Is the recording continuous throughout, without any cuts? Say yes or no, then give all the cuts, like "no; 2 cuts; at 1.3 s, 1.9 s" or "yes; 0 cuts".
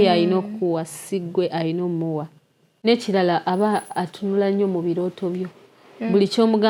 yes; 0 cuts